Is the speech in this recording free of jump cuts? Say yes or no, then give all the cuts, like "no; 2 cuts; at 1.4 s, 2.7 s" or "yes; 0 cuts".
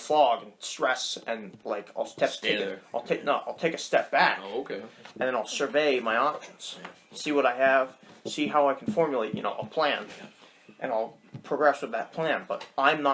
yes; 0 cuts